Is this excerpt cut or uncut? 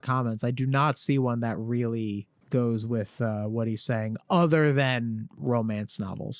cut